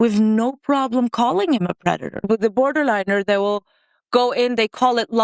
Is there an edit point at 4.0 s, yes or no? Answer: no